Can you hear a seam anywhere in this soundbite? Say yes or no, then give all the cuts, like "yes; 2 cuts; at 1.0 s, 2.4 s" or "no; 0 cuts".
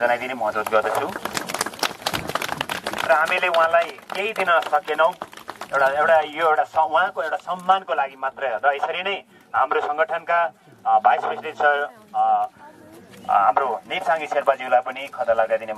no; 0 cuts